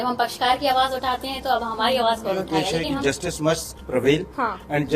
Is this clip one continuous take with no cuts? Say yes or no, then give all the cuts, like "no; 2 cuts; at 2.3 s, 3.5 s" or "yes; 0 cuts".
no; 1 cut; at 2.8 s